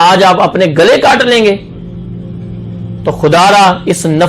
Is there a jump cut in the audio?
no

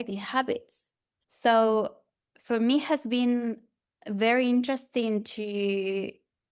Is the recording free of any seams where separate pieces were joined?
yes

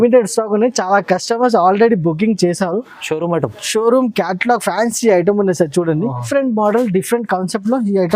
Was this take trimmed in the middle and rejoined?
yes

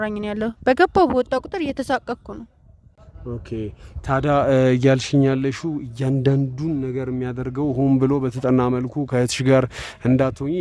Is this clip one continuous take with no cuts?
yes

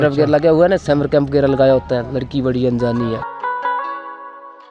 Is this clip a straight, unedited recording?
no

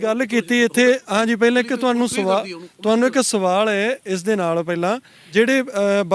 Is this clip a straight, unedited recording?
no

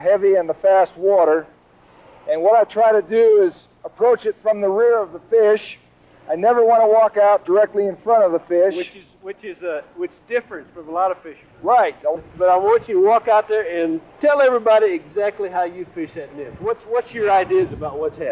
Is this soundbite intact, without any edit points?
yes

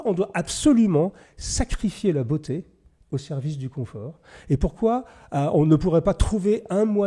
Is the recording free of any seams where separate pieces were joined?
yes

